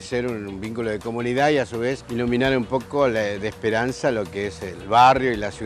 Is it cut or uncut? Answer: cut